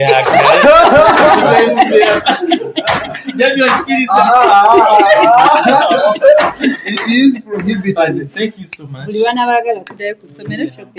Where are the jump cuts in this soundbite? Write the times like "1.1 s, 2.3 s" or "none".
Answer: none